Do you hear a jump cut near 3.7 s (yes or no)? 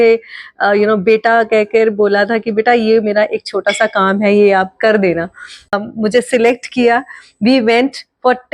no